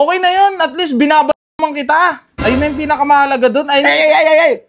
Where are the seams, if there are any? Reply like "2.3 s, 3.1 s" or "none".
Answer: none